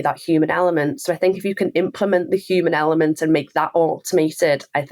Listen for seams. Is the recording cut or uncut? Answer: uncut